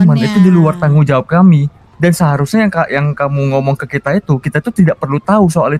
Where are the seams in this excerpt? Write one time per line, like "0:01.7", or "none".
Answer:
none